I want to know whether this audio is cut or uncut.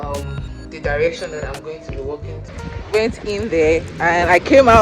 cut